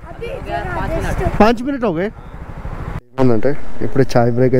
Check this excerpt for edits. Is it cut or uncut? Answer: cut